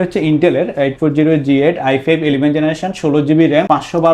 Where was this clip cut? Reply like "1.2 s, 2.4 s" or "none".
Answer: none